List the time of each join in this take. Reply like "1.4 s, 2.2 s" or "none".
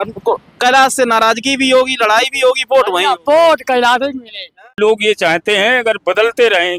4.6 s

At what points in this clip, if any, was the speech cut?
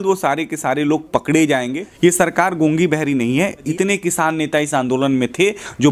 1.8 s, 3.7 s

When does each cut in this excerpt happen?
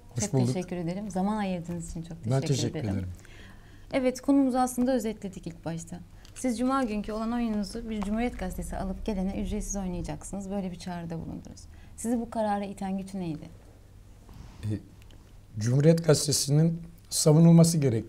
none

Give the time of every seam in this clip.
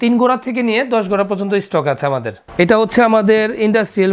2.4 s

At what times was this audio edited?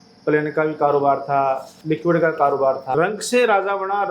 1.7 s, 2.9 s

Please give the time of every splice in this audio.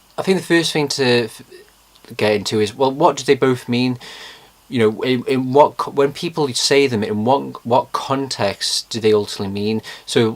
1.3 s

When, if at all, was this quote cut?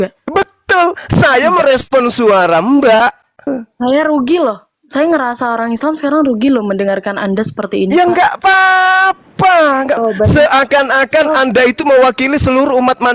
3.6 s, 10.0 s

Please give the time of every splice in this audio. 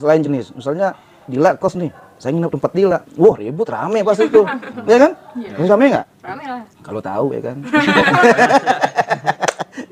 none

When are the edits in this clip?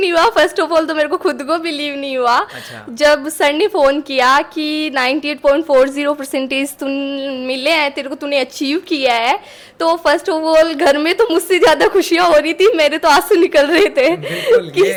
none

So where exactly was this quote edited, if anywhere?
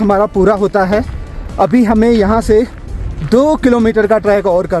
none

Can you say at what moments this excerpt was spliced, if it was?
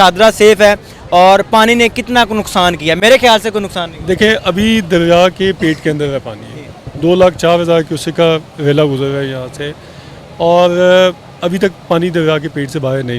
none

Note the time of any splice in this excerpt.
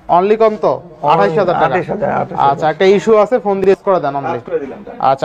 3.6 s

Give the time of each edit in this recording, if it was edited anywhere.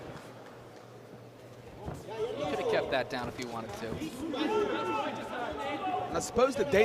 none

